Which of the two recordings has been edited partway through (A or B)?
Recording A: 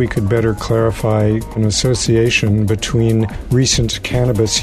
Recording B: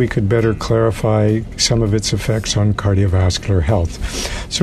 A